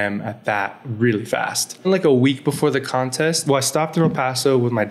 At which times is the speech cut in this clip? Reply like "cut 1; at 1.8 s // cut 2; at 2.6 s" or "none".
cut 1; at 1.9 s // cut 2; at 3.4 s